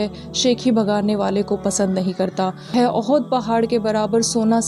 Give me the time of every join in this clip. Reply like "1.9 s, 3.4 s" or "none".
2.7 s